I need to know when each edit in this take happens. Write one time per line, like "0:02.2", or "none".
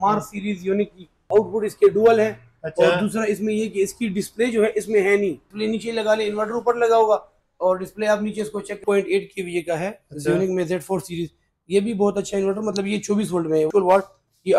0:01.2
0:05.5
0:08.8
0:13.7